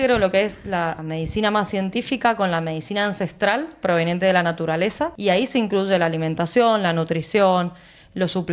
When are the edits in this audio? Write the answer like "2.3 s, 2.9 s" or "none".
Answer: 1.0 s, 5.1 s